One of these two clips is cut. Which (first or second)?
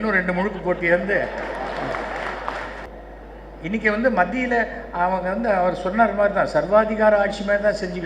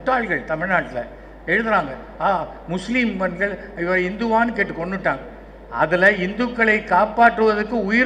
first